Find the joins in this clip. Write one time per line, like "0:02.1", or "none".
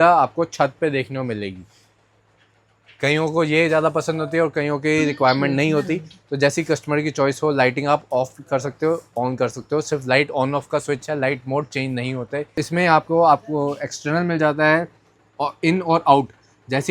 0:12.5